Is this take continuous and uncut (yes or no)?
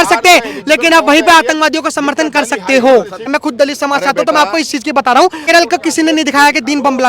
no